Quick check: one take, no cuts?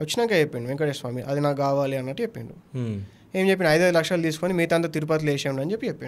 yes; 0 cuts

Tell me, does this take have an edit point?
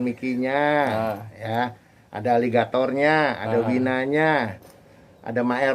no; 0 cuts

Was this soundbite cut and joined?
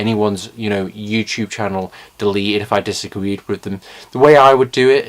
no; 0 cuts

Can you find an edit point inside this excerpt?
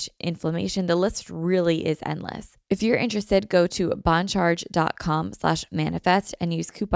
yes; 1 cut; at 2.5 s

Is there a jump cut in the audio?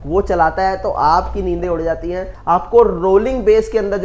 yes; 1 cut; at 2.3 s

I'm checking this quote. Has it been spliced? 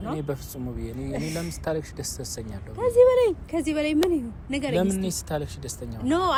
no; 0 cuts

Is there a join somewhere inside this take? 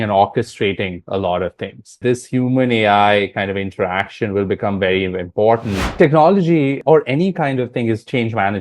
yes; 3 cuts; at 2.0 s, 6.0 s, 6.8 s

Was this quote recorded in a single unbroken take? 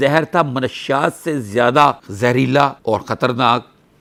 yes; 0 cuts

